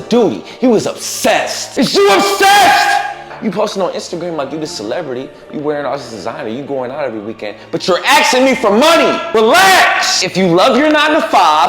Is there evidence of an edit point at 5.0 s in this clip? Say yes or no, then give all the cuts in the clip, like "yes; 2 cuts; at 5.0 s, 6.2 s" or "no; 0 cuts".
no; 4 cuts; at 1.6 s, 3.4 s, 9.2 s, 10.2 s